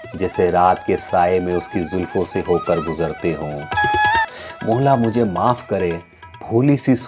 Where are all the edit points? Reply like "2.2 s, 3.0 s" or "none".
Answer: 4.3 s